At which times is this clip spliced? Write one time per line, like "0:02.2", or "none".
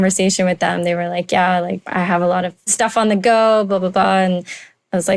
0:01.8
0:02.7